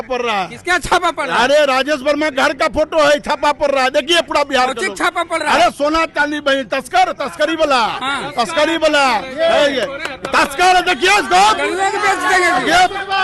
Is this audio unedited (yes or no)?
yes